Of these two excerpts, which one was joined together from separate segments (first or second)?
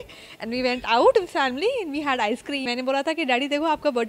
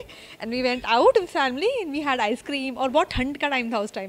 first